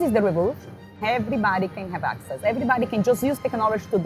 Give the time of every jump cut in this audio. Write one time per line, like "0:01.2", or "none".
0:01.0